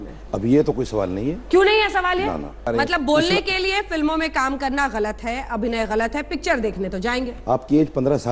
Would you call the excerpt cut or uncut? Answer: cut